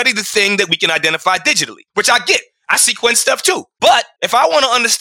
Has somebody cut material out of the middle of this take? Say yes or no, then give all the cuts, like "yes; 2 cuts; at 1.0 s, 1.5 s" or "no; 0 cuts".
yes; 1 cut; at 4.0 s